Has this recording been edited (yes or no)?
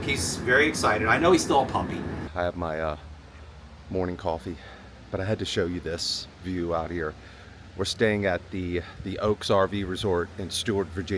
yes